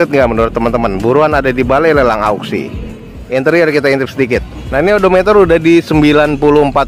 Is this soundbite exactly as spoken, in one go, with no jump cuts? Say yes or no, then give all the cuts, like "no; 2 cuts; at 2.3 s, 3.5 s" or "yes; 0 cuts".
no; 1 cut; at 3.1 s